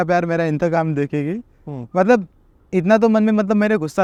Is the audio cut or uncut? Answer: uncut